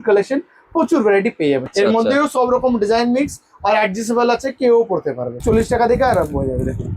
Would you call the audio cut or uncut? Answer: cut